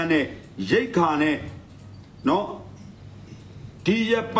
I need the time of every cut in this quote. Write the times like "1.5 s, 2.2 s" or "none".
none